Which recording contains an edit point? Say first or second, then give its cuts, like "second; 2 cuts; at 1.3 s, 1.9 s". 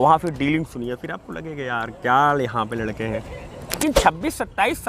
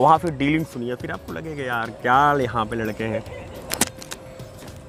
first; 1 cut; at 3.8 s